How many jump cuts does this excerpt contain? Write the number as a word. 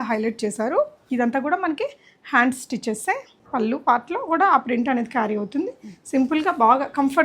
two